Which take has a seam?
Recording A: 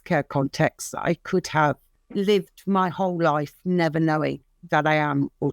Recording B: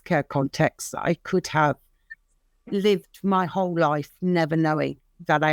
A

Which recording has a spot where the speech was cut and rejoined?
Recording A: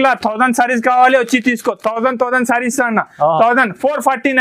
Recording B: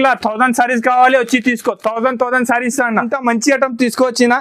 B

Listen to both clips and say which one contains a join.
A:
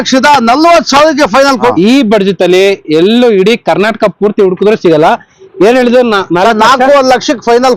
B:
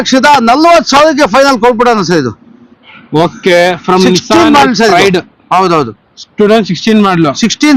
A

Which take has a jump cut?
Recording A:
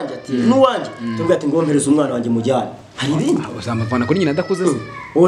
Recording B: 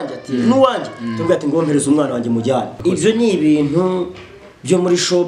B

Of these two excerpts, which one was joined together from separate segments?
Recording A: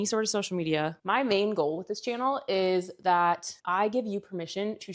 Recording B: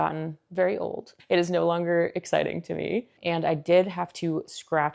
A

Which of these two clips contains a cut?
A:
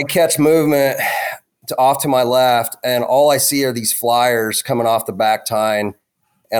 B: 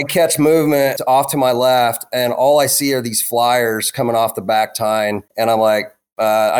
B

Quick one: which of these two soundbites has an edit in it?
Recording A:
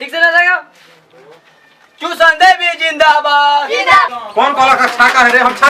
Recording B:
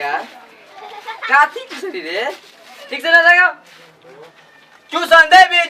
A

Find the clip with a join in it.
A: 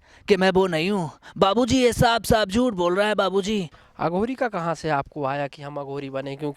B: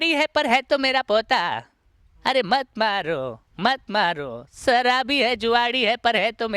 A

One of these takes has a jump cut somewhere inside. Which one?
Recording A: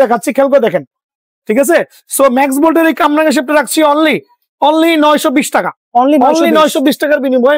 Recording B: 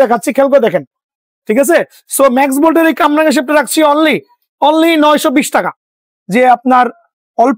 B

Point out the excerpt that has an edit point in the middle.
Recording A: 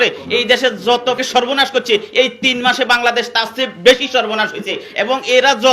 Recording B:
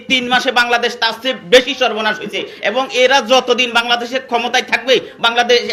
A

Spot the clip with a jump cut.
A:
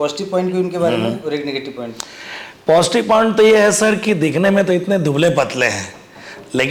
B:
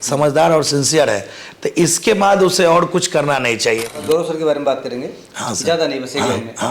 B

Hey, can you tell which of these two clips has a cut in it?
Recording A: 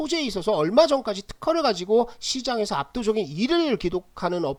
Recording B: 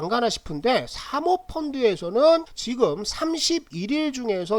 B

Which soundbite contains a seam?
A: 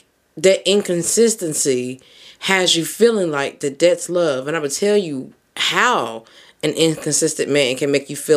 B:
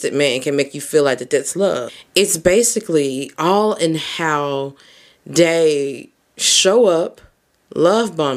B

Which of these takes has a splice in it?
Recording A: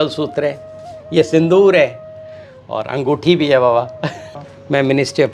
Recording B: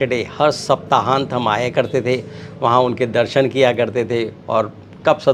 A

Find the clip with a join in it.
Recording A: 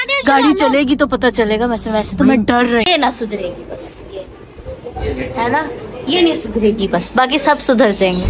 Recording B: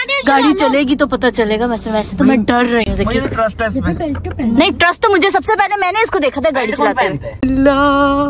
A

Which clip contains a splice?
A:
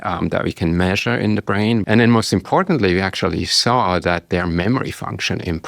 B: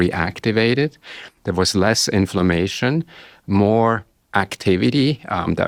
A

